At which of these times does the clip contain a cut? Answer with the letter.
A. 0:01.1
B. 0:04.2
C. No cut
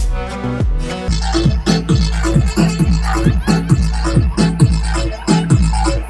A